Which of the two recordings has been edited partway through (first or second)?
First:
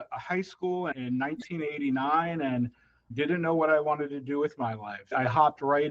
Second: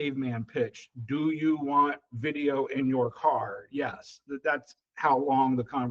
first